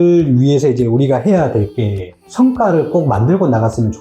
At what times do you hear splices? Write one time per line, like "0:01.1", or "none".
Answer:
0:02.2